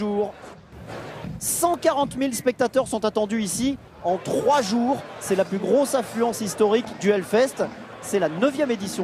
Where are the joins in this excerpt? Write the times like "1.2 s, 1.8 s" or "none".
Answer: none